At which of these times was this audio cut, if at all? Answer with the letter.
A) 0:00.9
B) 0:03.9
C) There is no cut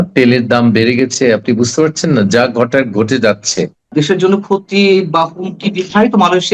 B